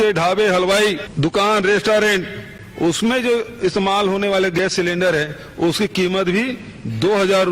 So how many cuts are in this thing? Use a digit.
1